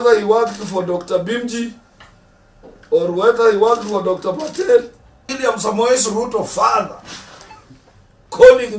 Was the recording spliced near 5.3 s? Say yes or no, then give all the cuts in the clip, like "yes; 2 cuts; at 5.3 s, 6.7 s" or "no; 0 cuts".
yes; 1 cut; at 5.3 s